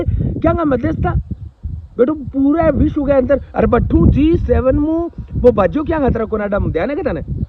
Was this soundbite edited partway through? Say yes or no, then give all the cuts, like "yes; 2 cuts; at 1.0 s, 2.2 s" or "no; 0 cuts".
no; 0 cuts